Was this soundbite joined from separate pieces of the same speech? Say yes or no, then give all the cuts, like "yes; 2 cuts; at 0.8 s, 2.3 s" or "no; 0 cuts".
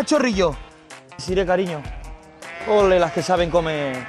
yes; 1 cut; at 1.1 s